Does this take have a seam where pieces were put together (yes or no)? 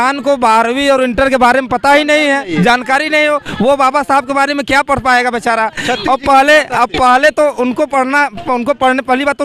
no